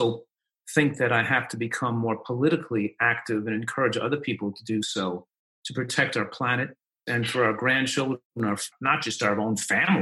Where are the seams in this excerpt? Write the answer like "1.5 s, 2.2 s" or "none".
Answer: 7.0 s, 8.7 s